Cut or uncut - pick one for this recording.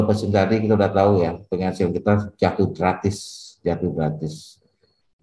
uncut